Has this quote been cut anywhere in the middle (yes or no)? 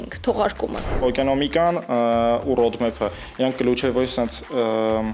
yes